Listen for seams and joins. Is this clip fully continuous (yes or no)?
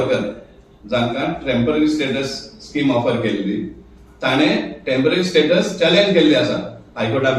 yes